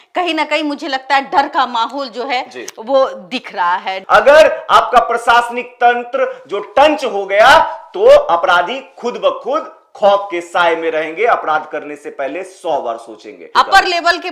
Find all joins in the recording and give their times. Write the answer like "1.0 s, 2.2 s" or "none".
3.9 s, 13.4 s

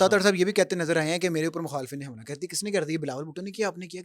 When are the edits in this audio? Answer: none

